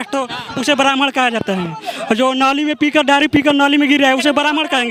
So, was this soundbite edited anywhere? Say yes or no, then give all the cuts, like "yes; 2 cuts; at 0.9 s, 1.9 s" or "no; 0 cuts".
no; 0 cuts